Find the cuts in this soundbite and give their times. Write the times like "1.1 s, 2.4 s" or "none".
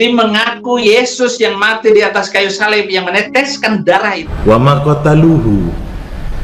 4.2 s